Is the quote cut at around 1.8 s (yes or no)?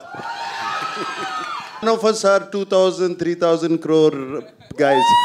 yes